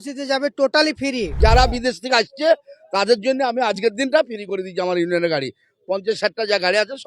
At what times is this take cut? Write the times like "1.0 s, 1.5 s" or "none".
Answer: 1.3 s